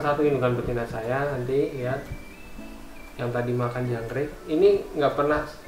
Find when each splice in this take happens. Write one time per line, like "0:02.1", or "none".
none

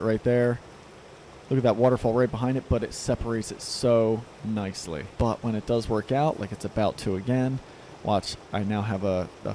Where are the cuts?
0:05.1

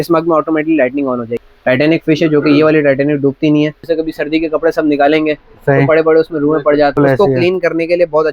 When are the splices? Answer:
0:01.3
0:03.8
0:07.0

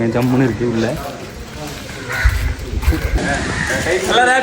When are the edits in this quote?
0:03.2

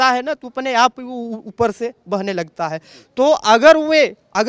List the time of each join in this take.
none

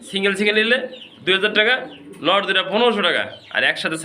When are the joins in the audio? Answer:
none

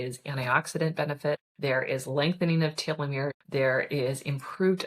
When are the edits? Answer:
0:01.5
0:03.4

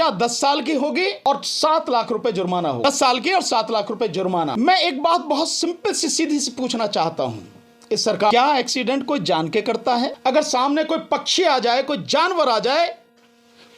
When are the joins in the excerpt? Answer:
0:01.2
0:02.8
0:04.5
0:08.3
0:10.2

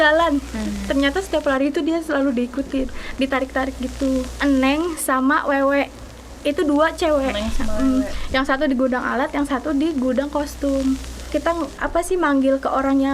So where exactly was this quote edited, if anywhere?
0:04.3
0:11.3

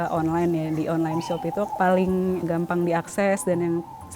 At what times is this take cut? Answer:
0:01.7
0:02.4

